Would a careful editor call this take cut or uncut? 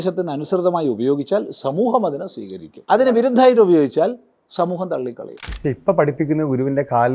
cut